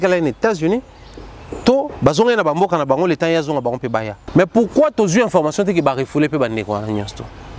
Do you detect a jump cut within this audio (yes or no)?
yes